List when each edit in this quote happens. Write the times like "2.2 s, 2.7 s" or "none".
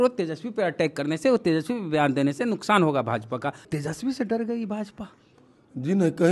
3.6 s